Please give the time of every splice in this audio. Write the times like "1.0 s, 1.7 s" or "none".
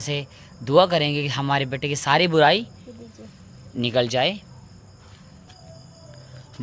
5.5 s